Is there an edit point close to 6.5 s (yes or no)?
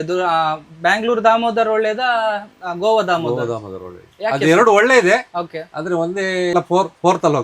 yes